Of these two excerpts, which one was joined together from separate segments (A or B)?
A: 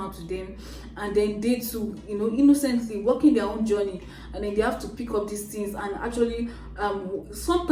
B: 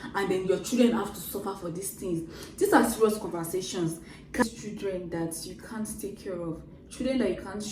B